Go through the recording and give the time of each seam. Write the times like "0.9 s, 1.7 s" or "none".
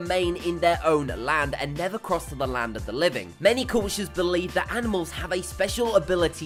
none